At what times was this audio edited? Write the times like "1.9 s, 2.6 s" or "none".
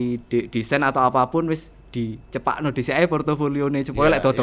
none